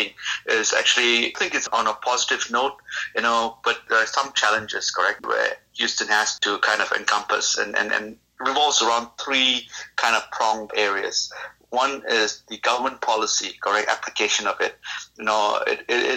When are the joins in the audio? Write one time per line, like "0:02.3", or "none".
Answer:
0:01.4
0:03.8
0:05.2
0:06.3
0:08.2
0:10.7